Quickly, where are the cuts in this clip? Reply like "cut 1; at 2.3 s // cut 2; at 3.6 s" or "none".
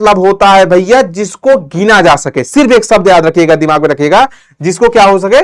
none